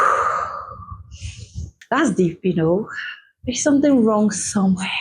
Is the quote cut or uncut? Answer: cut